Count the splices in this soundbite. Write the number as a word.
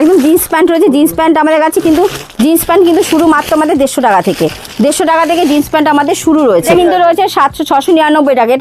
one